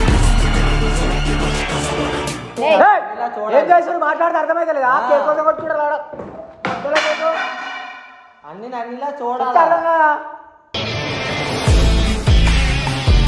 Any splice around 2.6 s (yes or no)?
yes